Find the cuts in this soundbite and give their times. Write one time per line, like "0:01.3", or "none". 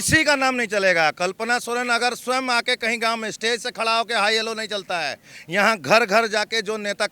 none